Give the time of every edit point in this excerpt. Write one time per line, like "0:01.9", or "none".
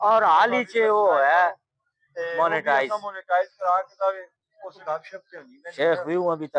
0:04.7